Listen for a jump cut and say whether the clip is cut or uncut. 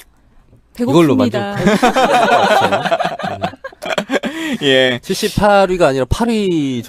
cut